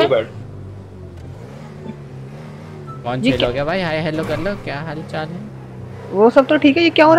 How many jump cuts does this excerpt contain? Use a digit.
0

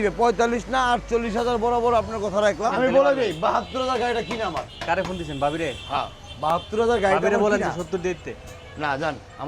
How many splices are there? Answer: 1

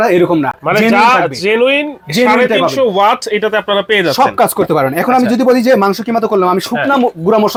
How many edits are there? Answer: 0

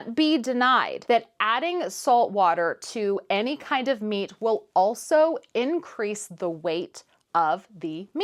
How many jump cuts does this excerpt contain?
0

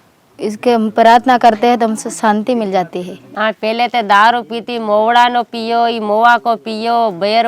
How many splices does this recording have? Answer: 1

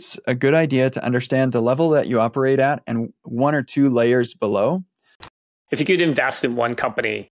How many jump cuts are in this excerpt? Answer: 1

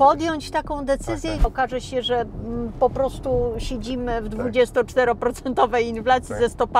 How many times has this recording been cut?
1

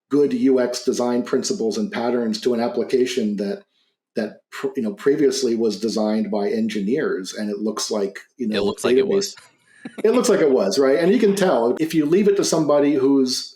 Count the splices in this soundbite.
1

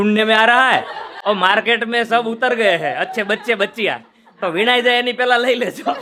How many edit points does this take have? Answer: 0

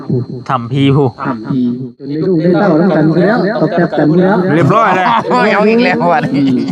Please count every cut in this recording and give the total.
1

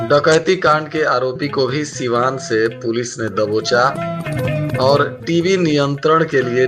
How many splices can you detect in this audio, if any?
0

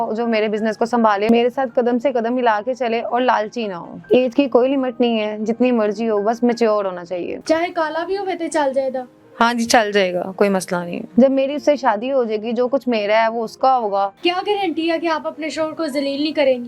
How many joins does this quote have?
4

